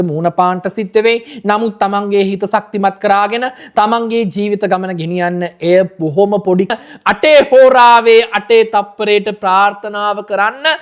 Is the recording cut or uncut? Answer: cut